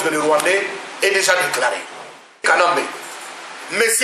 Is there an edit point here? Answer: yes; 1 cut; at 2.4 s

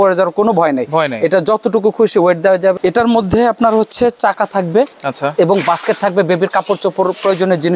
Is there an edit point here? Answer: yes; 1 cut; at 2.8 s

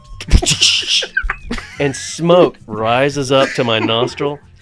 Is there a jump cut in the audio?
no; 0 cuts

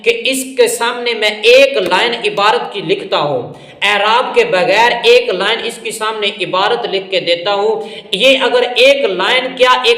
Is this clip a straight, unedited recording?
yes; 0 cuts

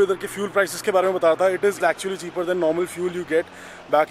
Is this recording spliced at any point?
yes; 1 cut; at 1.8 s

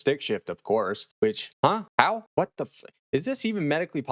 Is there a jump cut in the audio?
yes; 1 cut; at 1.1 s

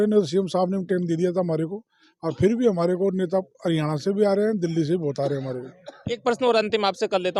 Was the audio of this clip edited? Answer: no; 0 cuts

